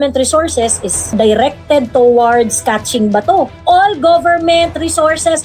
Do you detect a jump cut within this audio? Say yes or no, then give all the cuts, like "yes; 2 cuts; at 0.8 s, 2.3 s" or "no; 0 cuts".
yes; 1 cut; at 3.6 s